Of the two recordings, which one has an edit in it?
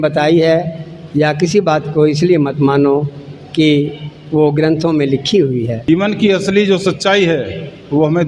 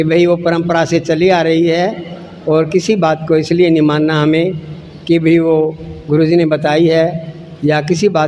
first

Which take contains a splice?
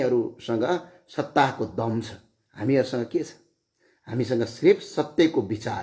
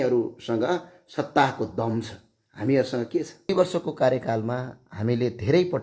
second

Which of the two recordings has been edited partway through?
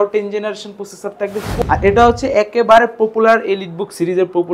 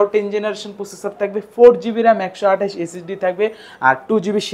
first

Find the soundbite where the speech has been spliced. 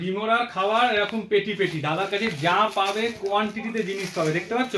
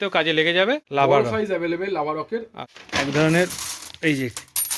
second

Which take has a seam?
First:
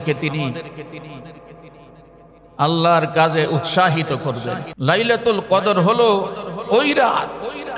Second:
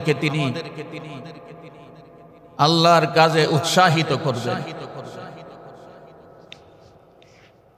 first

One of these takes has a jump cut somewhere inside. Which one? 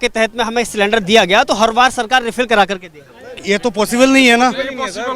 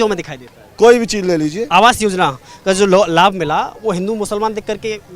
second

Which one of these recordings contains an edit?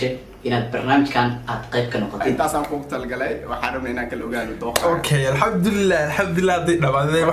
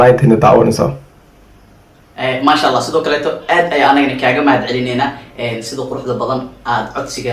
first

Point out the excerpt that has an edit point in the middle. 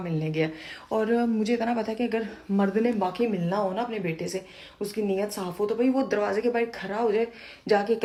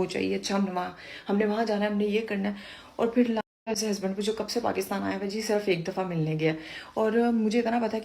second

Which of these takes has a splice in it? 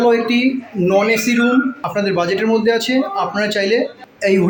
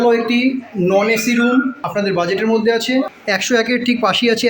second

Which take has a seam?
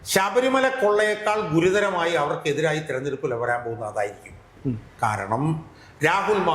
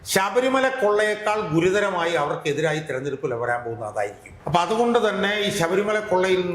second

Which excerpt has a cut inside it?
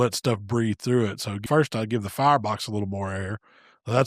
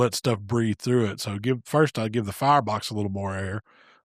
first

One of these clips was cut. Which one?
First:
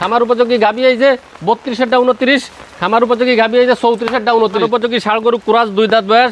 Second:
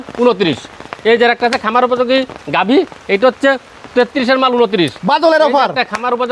first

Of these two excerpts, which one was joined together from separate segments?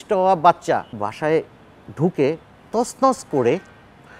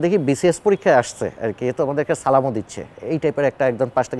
first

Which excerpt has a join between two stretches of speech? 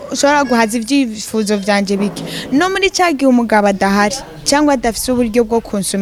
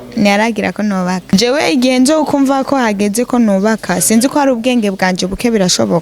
second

